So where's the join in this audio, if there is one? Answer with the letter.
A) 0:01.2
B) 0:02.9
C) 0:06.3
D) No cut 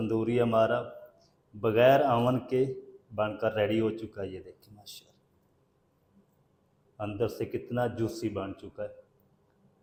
D